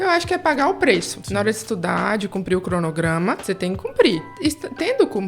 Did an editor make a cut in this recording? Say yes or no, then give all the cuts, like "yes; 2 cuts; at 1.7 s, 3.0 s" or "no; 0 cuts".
yes; 3 cuts; at 1.2 s, 3.4 s, 4.3 s